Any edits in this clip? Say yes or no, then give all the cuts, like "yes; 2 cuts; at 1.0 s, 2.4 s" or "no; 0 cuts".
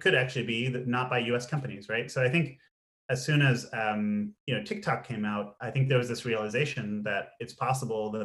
no; 0 cuts